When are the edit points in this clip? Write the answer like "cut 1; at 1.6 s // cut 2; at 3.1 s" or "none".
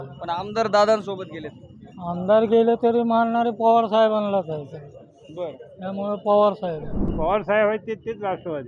cut 1; at 7.0 s